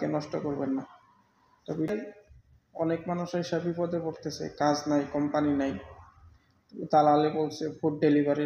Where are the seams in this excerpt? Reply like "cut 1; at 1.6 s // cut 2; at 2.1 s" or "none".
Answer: cut 1; at 1.9 s